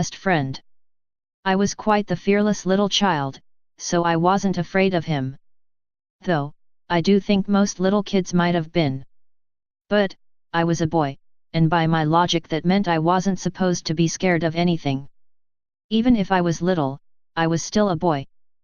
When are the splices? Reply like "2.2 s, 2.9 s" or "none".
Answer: 8.1 s